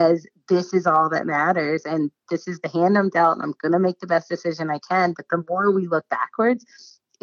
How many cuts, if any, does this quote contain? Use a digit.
0